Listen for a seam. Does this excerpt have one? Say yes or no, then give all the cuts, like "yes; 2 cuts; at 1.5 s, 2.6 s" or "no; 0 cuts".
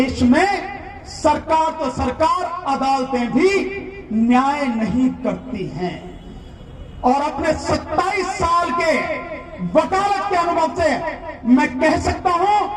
no; 0 cuts